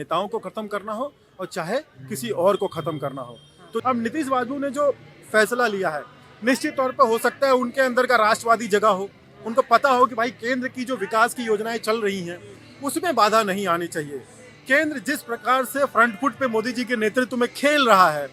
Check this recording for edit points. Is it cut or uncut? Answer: cut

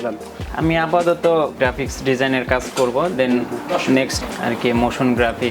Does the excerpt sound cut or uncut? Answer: uncut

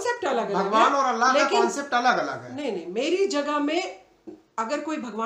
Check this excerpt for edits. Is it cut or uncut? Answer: uncut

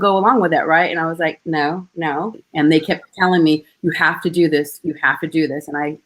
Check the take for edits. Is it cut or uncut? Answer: cut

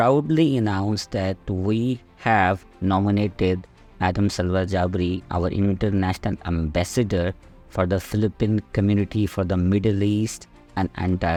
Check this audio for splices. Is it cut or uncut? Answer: uncut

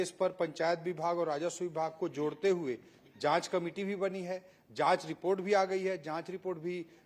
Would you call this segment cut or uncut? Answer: uncut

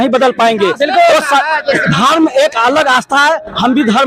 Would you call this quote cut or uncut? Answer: uncut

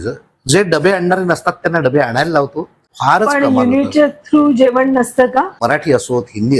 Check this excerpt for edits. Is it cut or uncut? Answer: cut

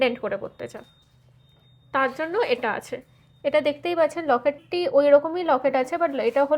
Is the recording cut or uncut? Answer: uncut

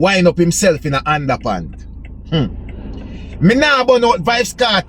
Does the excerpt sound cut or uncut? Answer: uncut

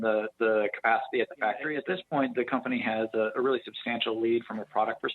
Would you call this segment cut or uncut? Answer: cut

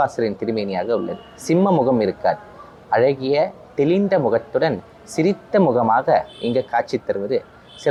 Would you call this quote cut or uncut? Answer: uncut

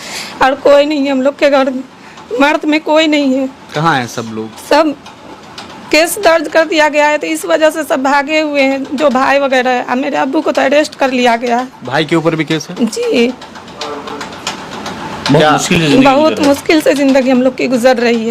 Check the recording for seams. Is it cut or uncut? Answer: uncut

